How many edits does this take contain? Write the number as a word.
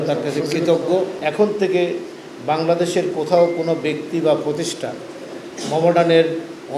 one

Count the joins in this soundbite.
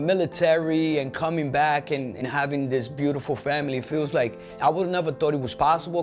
one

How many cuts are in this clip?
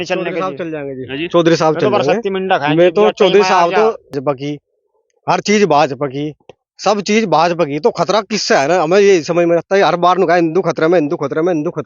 one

